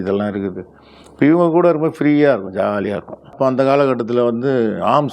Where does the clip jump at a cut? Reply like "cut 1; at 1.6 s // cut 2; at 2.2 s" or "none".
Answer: cut 1; at 3.3 s

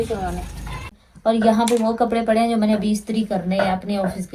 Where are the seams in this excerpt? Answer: cut 1; at 1.1 s

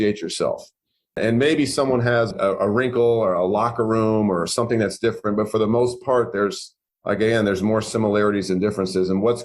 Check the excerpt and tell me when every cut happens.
cut 1; at 1.2 s // cut 2; at 2.3 s

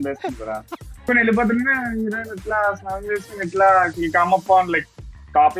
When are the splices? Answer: cut 1; at 1.1 s

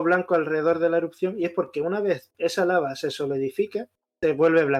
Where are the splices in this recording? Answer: none

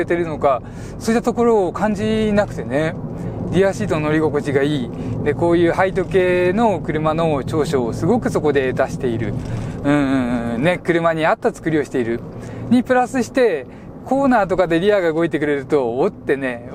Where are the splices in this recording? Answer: none

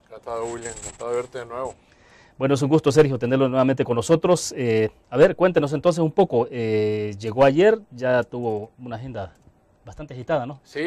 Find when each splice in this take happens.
cut 1; at 7.6 s

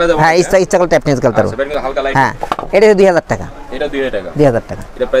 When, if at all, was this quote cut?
none

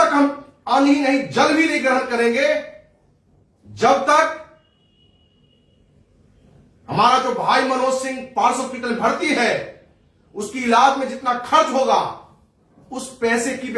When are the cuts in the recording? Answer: none

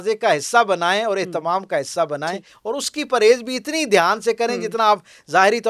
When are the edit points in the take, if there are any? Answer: none

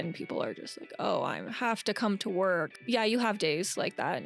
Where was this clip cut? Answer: cut 1; at 2.7 s

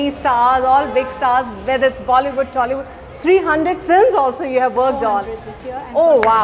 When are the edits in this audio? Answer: none

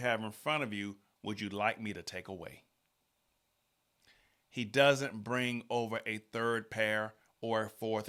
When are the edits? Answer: none

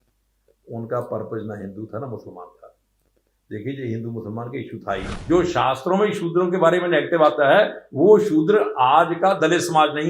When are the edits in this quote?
cut 1; at 5.1 s

